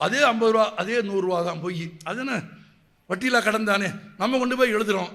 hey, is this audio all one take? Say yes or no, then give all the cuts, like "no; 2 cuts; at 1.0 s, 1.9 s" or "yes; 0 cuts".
yes; 0 cuts